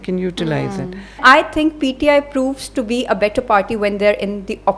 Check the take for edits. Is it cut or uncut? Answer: cut